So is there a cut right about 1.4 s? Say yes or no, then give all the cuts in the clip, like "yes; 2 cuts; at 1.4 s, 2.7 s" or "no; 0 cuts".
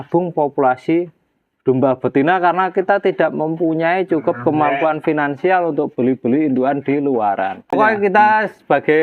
no; 1 cut; at 7.7 s